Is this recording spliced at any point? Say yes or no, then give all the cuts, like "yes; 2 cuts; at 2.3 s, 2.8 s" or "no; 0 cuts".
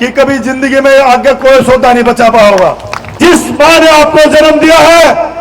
yes; 1 cut; at 3.2 s